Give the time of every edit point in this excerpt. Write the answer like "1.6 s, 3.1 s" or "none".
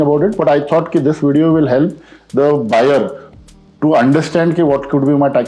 none